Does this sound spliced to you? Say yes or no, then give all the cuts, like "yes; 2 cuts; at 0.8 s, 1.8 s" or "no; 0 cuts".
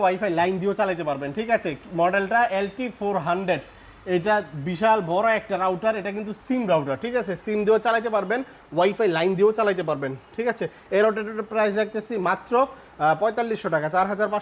no; 0 cuts